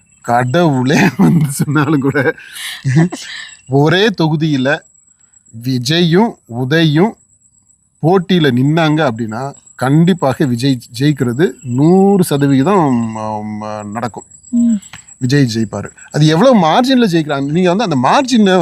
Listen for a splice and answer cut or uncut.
uncut